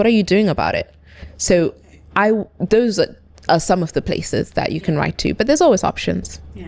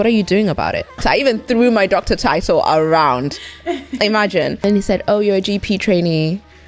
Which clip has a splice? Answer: second; 2 cuts; at 1.0 s, 4.6 s

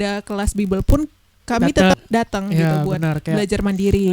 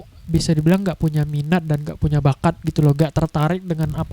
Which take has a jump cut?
first; 1 cut; at 1.9 s

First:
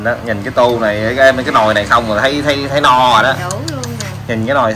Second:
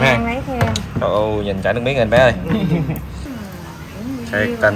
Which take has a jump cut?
second; 1 cut; at 3.2 s

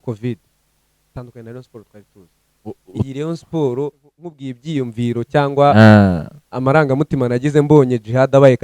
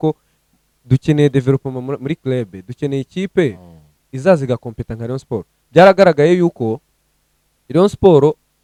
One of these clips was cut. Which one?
first; 1 cut; at 4.5 s

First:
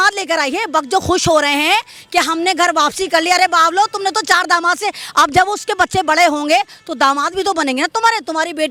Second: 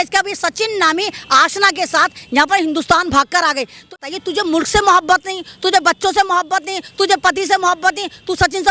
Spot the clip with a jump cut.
second; 1 cut; at 4.0 s

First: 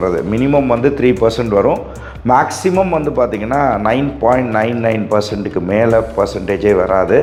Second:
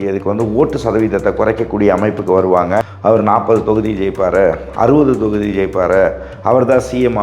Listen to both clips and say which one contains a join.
second; 1 cut; at 2.8 s

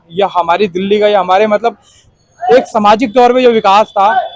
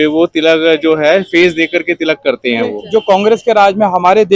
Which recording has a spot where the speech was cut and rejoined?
second; 1 cut; at 2.8 s

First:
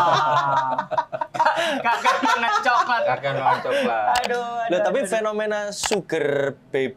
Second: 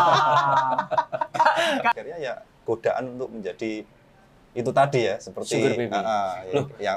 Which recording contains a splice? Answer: second; 1 cut; at 1.9 s

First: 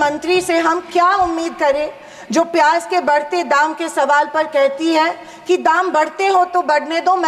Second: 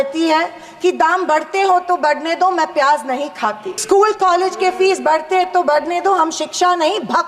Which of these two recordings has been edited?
second; 1 cut; at 3.7 s

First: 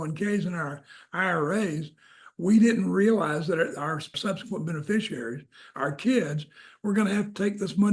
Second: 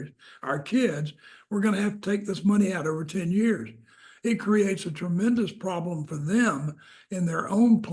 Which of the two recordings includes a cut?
first; 1 cut; at 4.1 s

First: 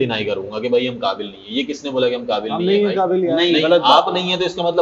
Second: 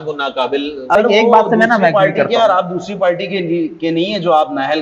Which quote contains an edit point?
second; 1 cut; at 0.9 s

